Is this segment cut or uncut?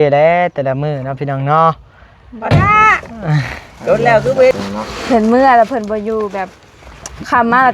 cut